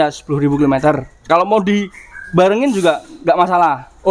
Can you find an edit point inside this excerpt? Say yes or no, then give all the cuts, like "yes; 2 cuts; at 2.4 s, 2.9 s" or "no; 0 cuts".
yes; 1 cut; at 1.2 s